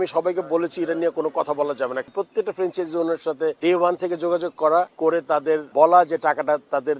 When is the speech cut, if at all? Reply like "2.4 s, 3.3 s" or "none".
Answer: 2.0 s, 3.6 s, 5.3 s